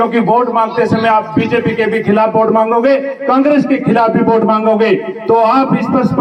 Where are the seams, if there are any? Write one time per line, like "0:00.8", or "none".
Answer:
none